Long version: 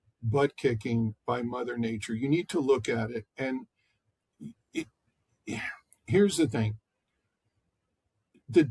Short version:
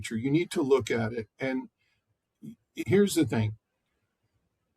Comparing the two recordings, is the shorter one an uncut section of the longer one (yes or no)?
no